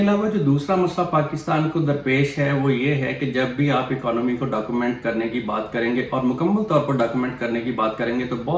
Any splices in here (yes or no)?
no